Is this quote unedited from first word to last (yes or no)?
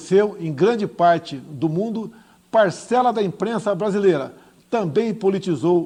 yes